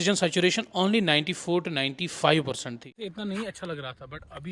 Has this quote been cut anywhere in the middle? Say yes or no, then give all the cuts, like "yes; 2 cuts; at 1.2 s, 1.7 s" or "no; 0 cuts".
yes; 1 cut; at 2.9 s